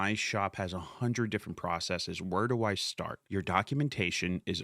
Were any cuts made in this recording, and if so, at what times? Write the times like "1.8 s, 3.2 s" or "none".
3.1 s

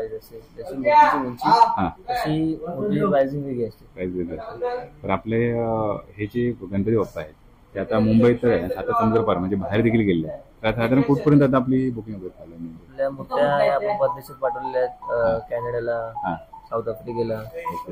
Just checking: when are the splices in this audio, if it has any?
none

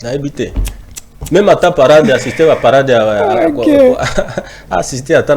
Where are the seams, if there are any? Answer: none

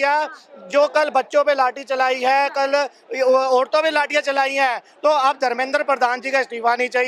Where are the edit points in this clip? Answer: none

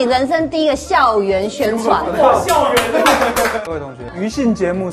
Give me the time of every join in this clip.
3.7 s

